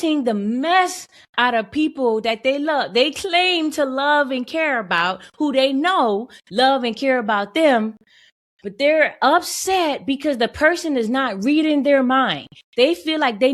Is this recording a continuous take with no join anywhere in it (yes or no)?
yes